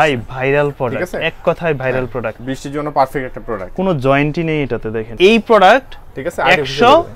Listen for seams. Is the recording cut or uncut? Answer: cut